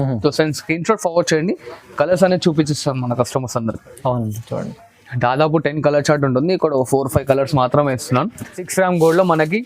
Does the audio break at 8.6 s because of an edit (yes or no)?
yes